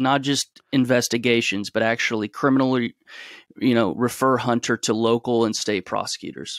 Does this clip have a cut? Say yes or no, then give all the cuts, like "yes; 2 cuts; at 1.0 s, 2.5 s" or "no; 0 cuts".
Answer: no; 0 cuts